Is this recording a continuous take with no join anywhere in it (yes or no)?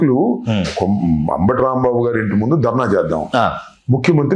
yes